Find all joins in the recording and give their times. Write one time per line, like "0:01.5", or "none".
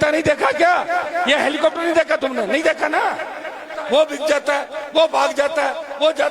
0:03.7